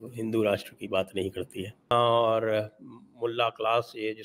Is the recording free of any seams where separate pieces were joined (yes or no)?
no